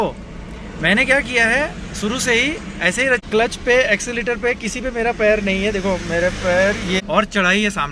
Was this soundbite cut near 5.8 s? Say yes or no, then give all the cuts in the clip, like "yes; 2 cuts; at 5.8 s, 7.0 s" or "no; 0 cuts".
no; 2 cuts; at 3.2 s, 7.0 s